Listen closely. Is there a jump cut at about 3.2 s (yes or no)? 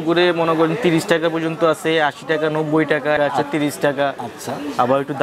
yes